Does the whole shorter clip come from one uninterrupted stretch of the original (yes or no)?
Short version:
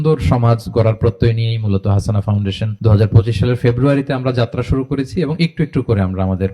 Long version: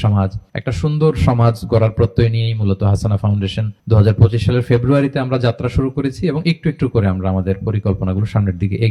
no